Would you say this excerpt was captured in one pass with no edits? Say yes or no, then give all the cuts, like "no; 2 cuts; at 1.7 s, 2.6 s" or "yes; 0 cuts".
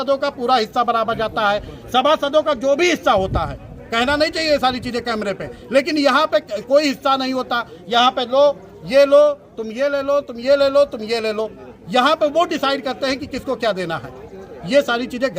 yes; 0 cuts